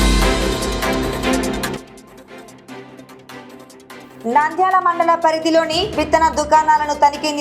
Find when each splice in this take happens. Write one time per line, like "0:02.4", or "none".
none

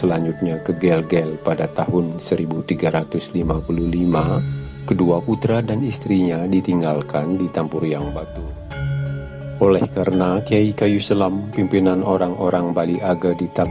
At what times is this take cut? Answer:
0:08.1

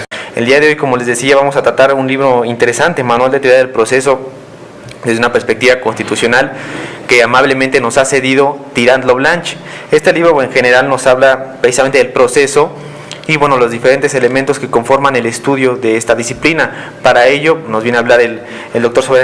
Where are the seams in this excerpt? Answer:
0:06.0

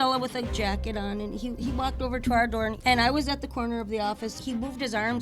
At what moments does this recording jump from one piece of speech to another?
0:02.8
0:04.4

